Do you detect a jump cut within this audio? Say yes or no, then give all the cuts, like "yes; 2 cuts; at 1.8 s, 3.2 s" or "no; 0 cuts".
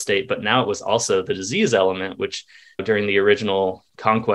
no; 0 cuts